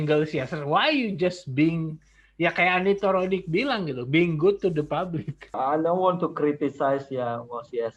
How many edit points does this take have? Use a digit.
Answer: 1